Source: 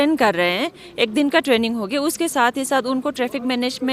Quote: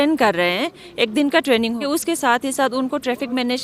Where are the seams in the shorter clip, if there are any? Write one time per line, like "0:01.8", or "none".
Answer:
0:01.8

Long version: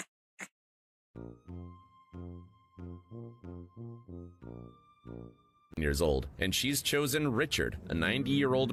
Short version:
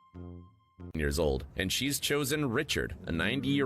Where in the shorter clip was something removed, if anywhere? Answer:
0:00.9

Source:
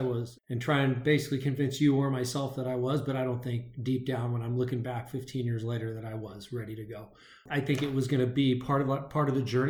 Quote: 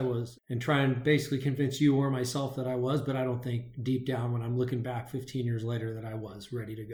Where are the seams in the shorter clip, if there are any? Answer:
none

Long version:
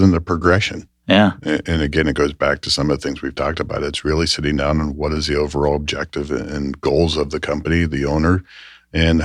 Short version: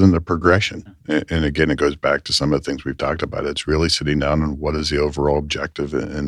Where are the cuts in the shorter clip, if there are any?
0:01.0

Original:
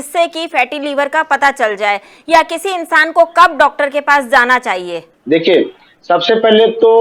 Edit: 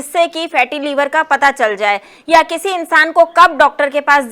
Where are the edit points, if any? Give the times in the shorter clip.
none

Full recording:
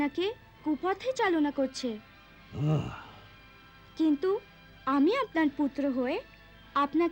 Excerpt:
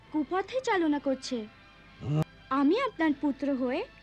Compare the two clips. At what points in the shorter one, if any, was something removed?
0:02.4

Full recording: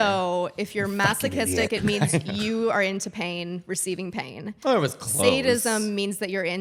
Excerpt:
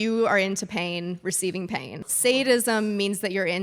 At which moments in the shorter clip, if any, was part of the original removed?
0:02.1

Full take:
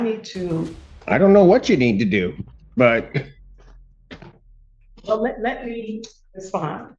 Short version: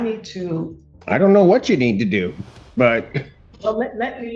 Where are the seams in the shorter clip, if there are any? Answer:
0:03.4

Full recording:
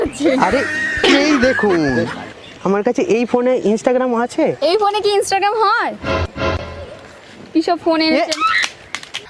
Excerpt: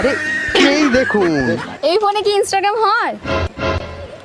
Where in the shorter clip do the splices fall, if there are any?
0:01.8

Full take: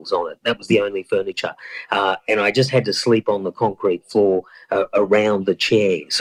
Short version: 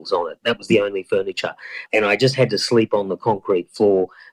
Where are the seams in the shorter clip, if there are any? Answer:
0:01.9

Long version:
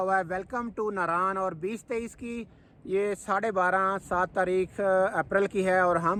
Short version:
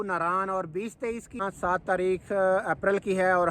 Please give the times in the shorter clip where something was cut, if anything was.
0:01.4

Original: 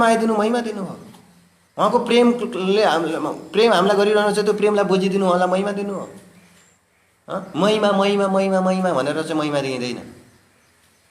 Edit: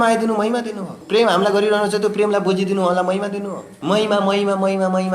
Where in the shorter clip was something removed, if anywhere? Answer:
0:00.9
0:03.7

